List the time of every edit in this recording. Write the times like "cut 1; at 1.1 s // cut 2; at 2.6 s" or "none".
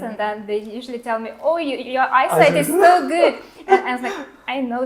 none